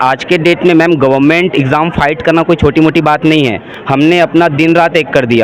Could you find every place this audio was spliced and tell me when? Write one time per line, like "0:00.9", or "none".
none